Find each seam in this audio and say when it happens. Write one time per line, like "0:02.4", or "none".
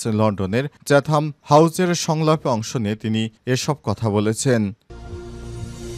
0:04.8